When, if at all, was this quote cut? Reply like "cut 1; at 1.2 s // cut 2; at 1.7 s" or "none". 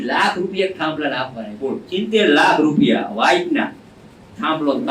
cut 1; at 1.8 s